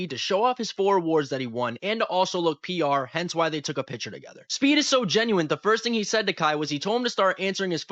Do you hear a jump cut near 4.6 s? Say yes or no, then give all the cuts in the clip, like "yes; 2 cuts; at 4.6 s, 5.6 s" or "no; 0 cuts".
no; 0 cuts